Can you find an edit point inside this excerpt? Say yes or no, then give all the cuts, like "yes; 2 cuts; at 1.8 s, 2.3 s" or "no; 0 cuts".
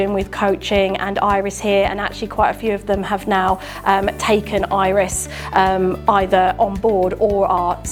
no; 0 cuts